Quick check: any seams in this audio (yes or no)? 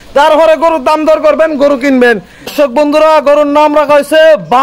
yes